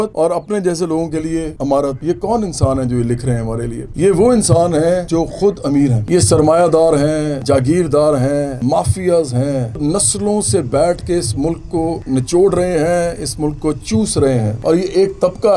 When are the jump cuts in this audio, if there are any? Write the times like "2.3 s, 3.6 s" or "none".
2.0 s, 5.0 s, 6.0 s, 7.3 s, 8.5 s, 9.8 s, 12.0 s, 14.5 s